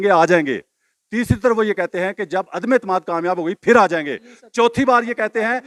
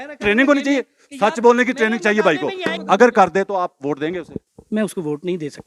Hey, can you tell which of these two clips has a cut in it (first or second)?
second